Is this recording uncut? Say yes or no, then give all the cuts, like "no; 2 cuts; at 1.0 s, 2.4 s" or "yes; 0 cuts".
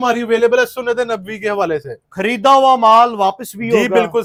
yes; 0 cuts